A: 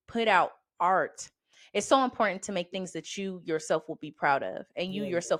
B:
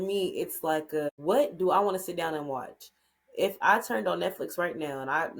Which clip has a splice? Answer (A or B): B